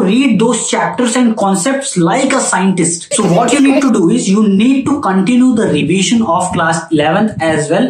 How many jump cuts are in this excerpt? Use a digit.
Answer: 1